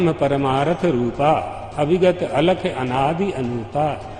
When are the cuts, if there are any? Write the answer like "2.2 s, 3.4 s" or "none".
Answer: none